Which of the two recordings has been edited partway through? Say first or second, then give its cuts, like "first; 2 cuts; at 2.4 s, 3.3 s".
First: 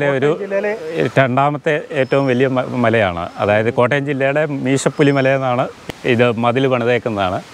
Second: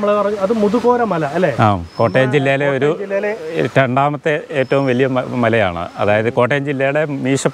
first; 1 cut; at 5.9 s